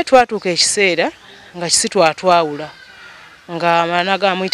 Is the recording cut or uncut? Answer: uncut